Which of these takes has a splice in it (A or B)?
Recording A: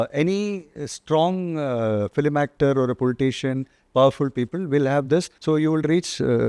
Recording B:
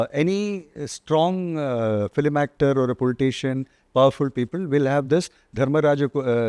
A